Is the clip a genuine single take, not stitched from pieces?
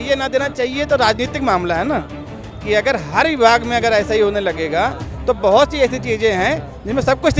yes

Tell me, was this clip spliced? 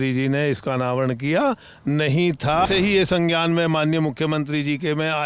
yes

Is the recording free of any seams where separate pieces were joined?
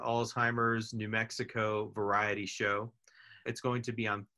no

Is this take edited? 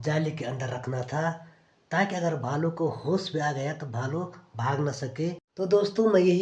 yes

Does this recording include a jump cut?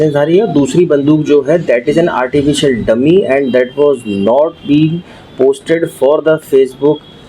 no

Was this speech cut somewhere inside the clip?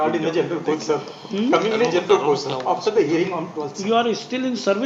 no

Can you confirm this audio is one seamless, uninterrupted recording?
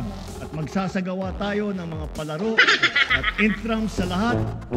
yes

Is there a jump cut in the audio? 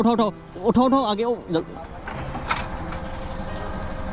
no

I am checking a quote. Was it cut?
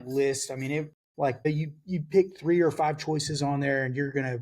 yes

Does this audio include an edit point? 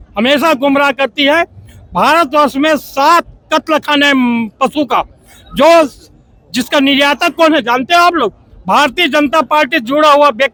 no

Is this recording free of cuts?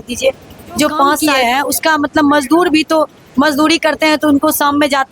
no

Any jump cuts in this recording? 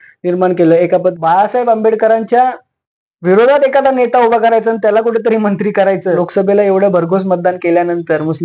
yes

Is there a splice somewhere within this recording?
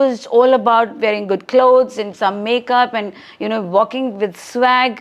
no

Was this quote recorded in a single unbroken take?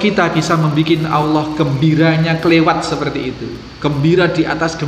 yes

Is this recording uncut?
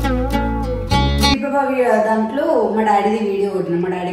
no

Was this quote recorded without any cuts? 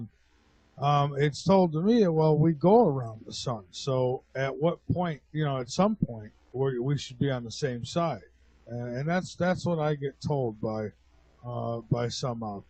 no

